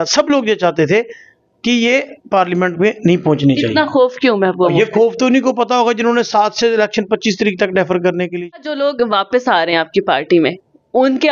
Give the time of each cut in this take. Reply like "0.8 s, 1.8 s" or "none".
8.4 s